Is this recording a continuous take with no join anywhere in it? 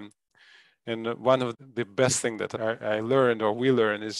no; 2 cuts; at 1.5 s, 2.5 s

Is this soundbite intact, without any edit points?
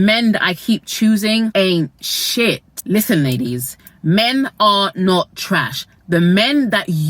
no; 2 cuts; at 1.5 s, 2.7 s

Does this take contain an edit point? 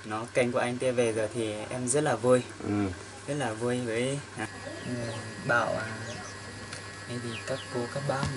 yes; 1 cut; at 4.7 s

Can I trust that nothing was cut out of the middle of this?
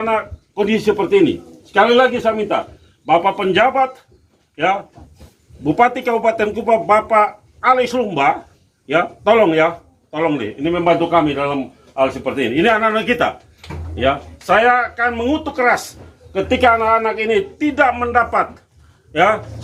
yes; 0 cuts

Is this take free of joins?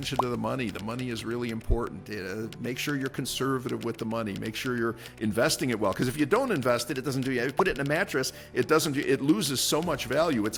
yes; 0 cuts

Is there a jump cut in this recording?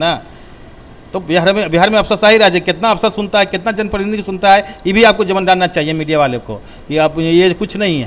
no; 0 cuts

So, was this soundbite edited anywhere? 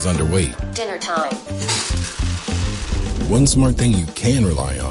no; 0 cuts

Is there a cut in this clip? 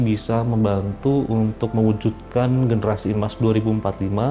no; 0 cuts

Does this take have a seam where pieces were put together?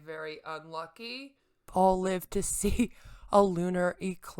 yes; 1 cut; at 1.7 s

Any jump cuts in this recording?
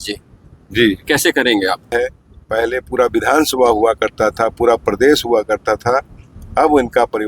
yes; 1 cut; at 1.9 s

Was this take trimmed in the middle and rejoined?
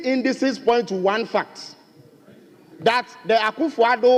no; 0 cuts

